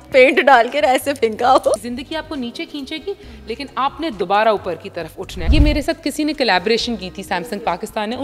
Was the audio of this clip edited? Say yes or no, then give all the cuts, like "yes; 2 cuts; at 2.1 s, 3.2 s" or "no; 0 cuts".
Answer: yes; 2 cuts; at 1.8 s, 5.5 s